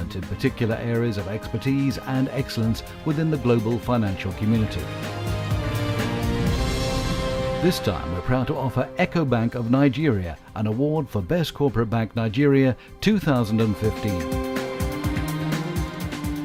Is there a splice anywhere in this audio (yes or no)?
no